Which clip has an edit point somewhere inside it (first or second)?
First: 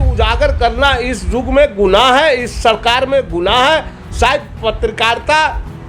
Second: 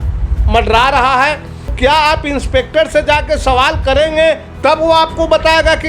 second